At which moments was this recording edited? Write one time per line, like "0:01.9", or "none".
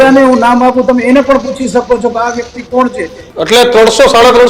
0:03.2